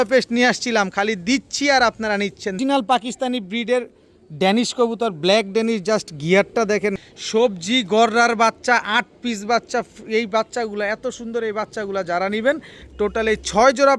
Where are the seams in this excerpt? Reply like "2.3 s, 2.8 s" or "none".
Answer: 2.6 s, 7.0 s, 12.8 s